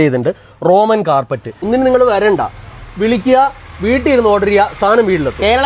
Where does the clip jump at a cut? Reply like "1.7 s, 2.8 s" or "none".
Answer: 1.6 s